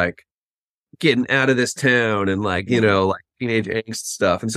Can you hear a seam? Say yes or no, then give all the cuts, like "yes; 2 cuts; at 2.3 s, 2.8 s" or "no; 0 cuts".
no; 0 cuts